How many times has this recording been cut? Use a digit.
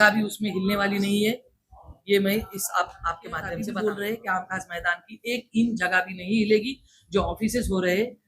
1